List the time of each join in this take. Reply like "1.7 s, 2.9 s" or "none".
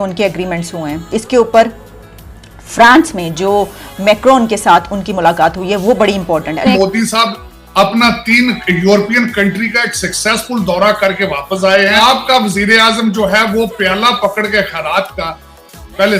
1.0 s, 6.6 s, 12.0 s